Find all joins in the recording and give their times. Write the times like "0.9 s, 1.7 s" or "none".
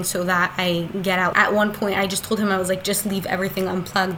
1.3 s